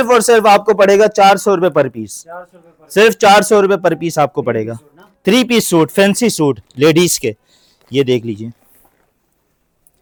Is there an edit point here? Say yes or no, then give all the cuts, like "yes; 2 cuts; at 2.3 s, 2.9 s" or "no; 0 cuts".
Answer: no; 0 cuts